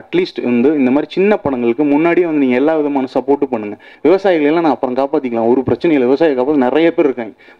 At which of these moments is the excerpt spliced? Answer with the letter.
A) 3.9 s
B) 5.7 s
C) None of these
A